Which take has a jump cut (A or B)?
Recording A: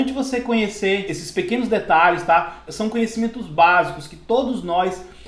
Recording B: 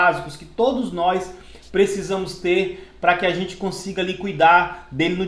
A